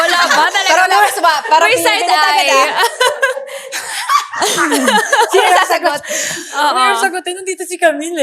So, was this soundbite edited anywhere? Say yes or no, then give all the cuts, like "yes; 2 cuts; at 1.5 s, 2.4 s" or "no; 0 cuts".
no; 0 cuts